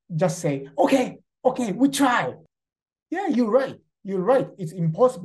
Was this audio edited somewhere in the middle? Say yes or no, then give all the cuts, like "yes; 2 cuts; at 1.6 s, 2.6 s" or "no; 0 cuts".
yes; 1 cut; at 2.4 s